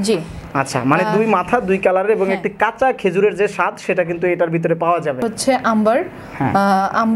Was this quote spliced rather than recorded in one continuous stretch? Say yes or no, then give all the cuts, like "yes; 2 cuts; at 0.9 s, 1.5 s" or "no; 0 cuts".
yes; 1 cut; at 5.2 s